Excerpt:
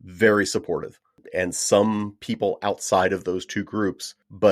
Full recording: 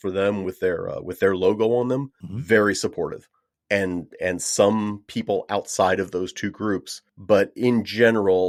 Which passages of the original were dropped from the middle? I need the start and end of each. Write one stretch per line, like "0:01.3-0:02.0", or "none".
0:03.5-0:04.1